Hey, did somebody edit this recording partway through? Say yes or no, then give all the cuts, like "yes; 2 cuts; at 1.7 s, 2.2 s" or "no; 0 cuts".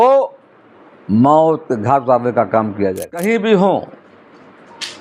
yes; 1 cut; at 3.2 s